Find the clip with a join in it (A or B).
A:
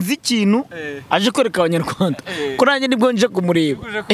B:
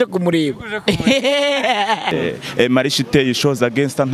B